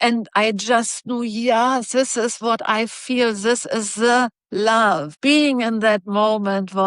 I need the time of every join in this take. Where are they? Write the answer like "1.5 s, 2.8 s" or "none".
5.2 s